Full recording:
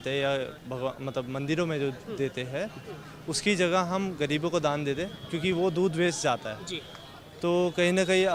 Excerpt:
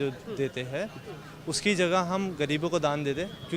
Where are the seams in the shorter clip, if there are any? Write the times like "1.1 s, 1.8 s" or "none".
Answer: none